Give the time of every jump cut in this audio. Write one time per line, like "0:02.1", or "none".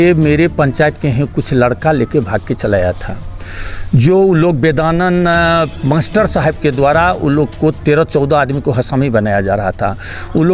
none